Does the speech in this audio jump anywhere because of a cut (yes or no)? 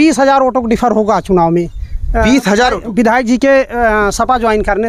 no